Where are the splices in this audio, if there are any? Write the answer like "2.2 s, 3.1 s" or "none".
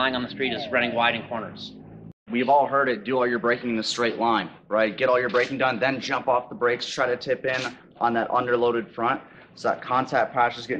2.1 s